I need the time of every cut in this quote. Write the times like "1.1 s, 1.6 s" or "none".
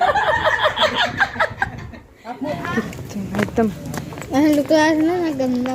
2.5 s